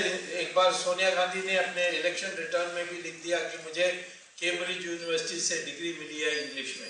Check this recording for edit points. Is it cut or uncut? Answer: uncut